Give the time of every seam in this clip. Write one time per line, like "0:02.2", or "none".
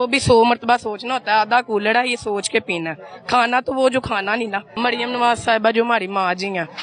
0:04.6